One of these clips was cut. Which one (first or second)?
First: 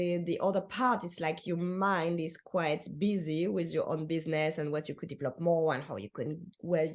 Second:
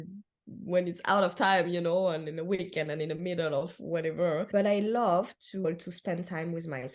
second